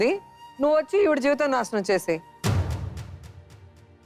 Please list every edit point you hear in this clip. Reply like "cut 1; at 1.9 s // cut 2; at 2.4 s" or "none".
none